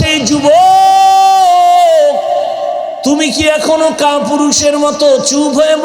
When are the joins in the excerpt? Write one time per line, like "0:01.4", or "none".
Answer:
0:03.0